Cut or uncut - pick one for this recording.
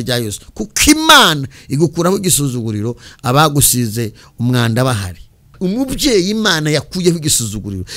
cut